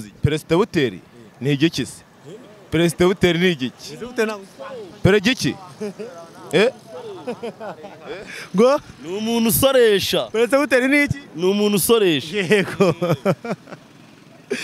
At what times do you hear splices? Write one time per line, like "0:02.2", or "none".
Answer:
none